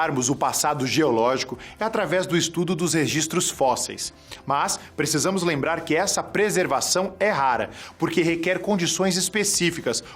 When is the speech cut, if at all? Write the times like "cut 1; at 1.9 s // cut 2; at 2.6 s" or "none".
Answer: cut 1; at 2.5 s // cut 2; at 8.4 s